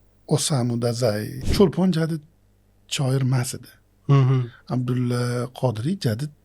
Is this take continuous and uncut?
no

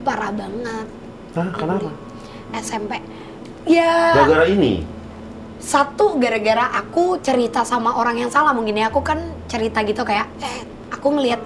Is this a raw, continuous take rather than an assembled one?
yes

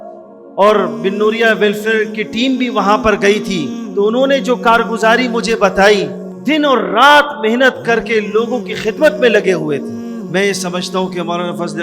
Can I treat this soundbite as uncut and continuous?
no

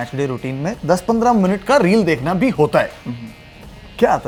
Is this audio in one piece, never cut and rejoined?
yes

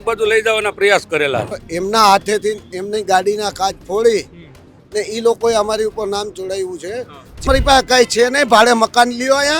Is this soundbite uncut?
no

